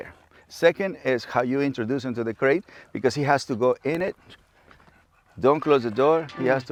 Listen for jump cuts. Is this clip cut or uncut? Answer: uncut